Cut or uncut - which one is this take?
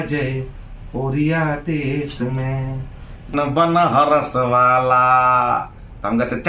cut